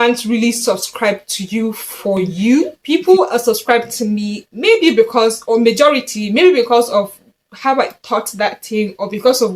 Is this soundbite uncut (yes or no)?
no